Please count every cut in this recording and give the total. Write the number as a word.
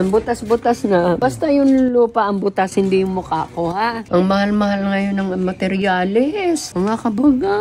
three